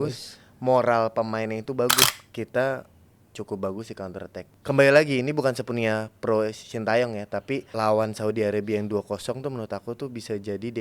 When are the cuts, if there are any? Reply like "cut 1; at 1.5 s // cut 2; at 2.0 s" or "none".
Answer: cut 1; at 2.1 s // cut 2; at 4.4 s // cut 3; at 7.7 s

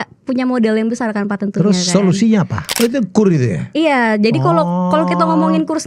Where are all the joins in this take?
cut 1; at 2.6 s

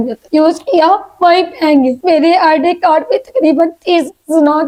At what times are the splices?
none

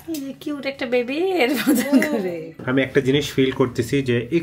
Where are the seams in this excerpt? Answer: cut 1; at 2.5 s

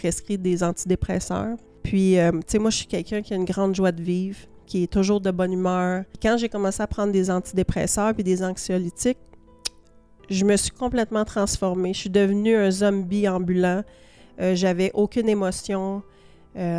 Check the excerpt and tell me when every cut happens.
cut 1; at 1.7 s // cut 2; at 6.1 s

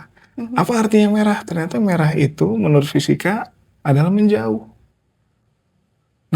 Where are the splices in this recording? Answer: none

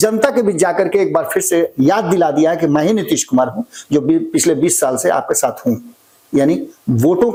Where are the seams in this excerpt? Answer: none

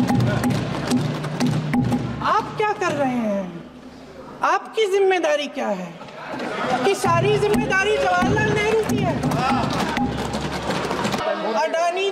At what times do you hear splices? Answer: cut 1; at 11.2 s

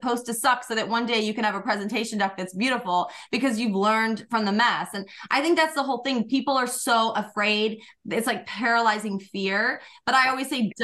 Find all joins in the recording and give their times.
none

